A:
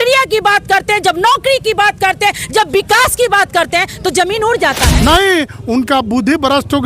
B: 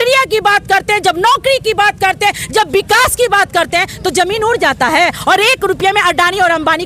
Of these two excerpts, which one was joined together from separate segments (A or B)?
A